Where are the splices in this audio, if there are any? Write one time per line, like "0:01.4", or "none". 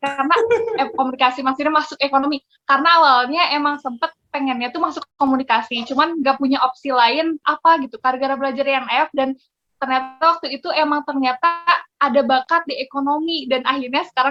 none